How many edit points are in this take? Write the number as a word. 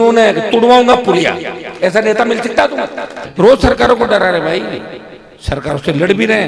one